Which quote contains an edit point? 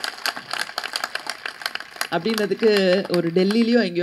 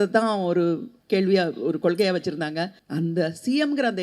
second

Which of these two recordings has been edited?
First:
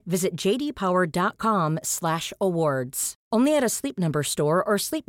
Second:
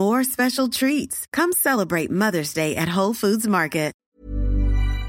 second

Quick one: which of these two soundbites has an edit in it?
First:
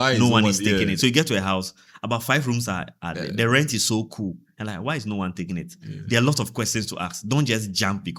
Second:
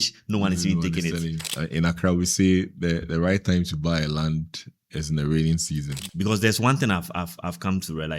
second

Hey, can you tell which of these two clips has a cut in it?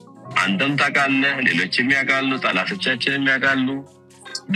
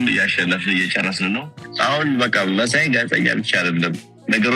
second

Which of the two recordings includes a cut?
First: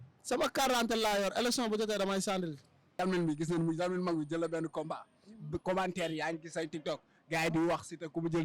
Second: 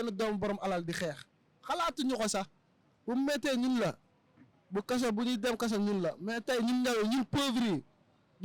first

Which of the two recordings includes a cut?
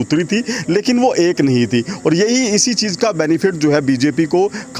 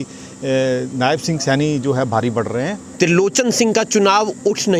second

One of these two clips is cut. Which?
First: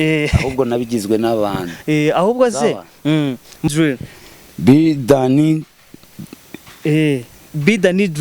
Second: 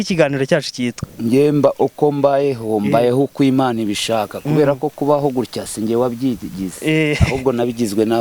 first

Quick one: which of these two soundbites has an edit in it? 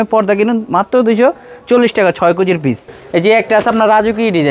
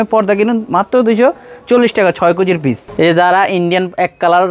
first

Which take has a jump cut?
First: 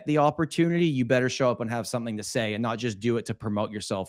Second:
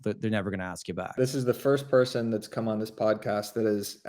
second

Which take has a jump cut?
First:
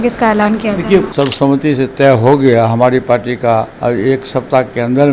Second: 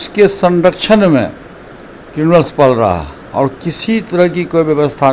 first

